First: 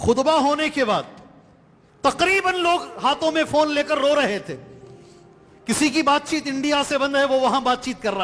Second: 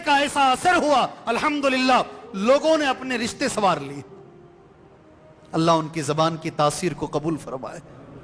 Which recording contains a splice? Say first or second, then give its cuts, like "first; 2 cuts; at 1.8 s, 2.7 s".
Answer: second; 2 cuts; at 4.1 s, 5.5 s